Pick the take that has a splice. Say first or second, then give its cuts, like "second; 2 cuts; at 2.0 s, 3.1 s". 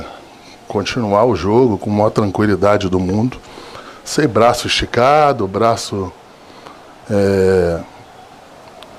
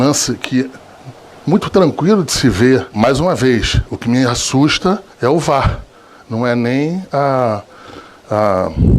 second; 1 cut; at 2.9 s